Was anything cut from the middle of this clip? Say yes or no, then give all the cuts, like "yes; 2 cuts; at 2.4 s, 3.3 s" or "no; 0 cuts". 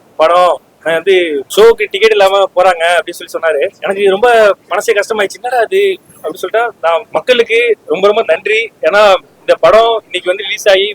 yes; 3 cuts; at 1.4 s, 3.8 s, 7.1 s